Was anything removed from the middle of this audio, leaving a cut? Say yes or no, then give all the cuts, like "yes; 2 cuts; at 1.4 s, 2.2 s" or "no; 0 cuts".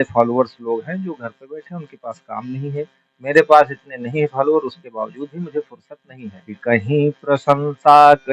yes; 1 cut; at 6.5 s